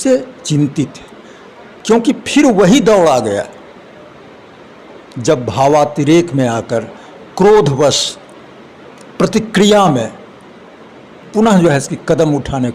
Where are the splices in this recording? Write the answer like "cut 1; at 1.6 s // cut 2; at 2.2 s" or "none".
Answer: none